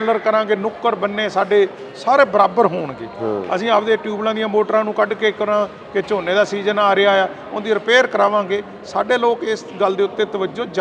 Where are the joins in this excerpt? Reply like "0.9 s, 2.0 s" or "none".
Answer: none